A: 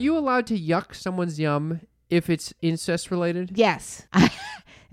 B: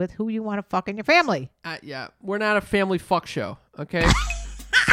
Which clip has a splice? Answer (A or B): A